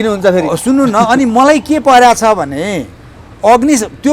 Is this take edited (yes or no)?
no